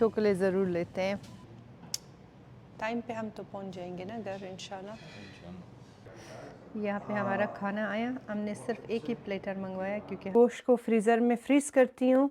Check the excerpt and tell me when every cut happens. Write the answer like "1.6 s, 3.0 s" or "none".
1.4 s, 6.1 s, 10.3 s